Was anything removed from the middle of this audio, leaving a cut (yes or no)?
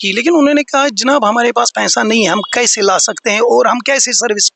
no